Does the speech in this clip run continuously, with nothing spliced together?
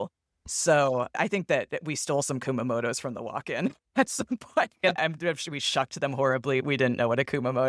no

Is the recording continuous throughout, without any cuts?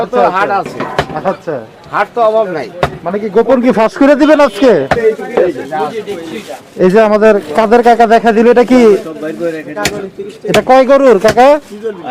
no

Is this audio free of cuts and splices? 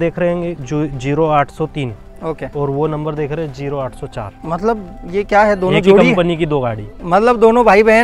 yes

